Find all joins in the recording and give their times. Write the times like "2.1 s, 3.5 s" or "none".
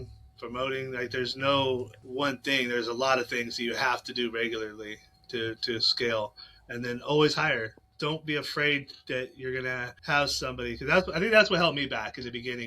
2.0 s, 7.8 s, 9.9 s